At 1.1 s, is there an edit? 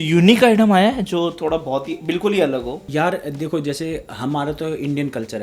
no; 0 cuts

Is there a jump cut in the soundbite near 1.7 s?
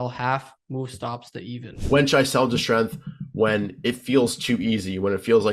yes; 1 cut; at 1.7 s

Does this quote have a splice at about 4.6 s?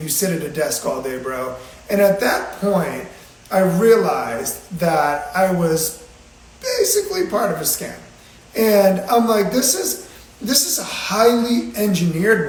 no; 0 cuts

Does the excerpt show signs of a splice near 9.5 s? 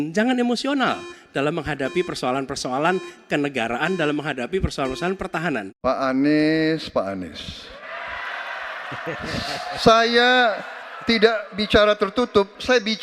no; 1 cut; at 5.7 s

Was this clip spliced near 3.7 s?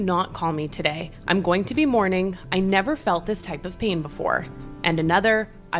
no; 0 cuts

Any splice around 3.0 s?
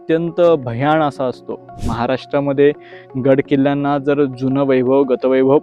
no; 1 cut; at 1.7 s

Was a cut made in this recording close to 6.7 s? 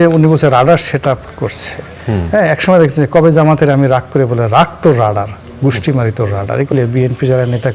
yes; 1 cut; at 6.7 s

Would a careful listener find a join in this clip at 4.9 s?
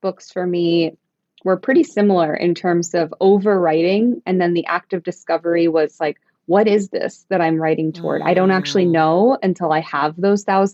no; 0 cuts

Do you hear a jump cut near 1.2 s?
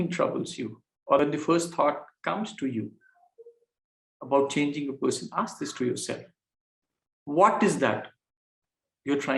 yes; 1 cut; at 1.2 s

